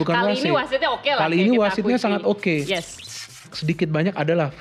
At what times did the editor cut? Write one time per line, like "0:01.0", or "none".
0:03.1